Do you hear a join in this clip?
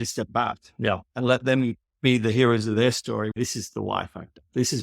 yes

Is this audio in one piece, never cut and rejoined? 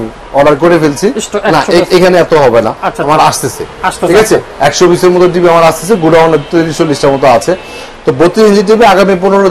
yes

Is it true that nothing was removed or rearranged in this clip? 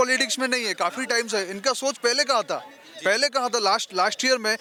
yes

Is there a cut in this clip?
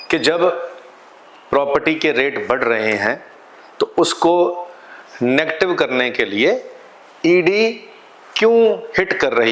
no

